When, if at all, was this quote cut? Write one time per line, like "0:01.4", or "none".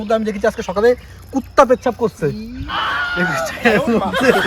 none